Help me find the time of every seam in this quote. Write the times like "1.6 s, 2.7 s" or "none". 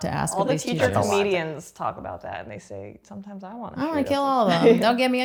none